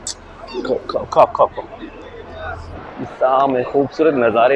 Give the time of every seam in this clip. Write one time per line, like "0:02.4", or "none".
0:02.8